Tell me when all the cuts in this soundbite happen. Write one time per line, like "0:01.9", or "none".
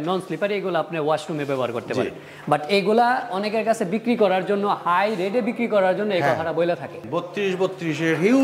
0:06.9